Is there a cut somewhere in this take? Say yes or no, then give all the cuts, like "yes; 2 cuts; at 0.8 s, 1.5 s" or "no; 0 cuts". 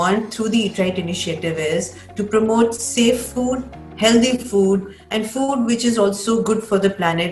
no; 0 cuts